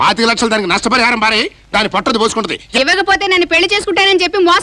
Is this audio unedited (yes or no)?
no